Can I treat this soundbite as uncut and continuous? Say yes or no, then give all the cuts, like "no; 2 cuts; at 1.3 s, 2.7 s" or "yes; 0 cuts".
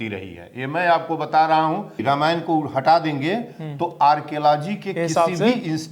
no; 1 cut; at 2.0 s